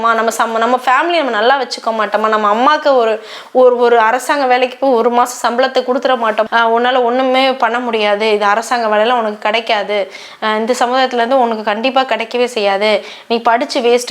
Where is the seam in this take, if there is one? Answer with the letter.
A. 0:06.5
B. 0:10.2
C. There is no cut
A